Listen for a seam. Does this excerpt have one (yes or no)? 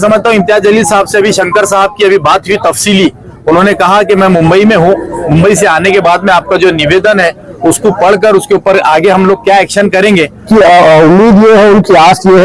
yes